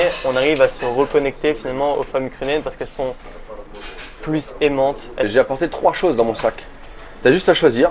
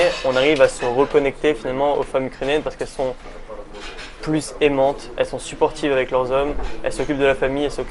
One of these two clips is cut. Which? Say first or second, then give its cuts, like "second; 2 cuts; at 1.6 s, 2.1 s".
first; 1 cut; at 5.3 s